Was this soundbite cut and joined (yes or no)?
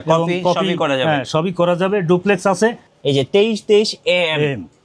yes